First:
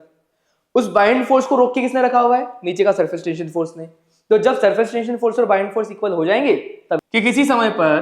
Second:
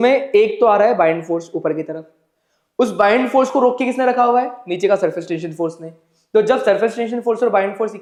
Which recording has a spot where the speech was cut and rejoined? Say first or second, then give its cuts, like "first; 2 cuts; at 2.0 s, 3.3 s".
first; 1 cut; at 7.0 s